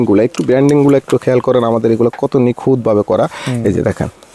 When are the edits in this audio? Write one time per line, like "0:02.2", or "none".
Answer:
none